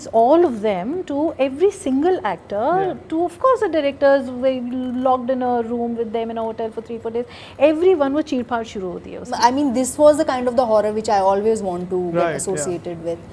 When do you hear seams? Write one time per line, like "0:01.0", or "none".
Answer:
0:09.2